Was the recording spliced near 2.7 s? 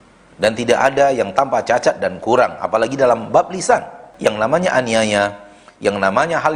no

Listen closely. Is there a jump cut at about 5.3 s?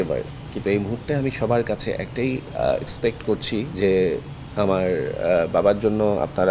no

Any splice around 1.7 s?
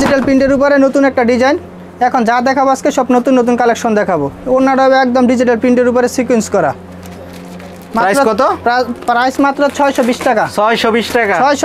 no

